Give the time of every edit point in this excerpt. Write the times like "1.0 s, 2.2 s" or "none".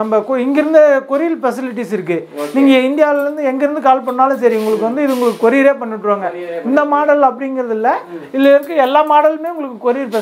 none